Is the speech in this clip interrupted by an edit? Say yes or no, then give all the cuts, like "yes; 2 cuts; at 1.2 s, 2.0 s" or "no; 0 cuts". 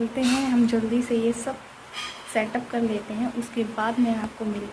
no; 0 cuts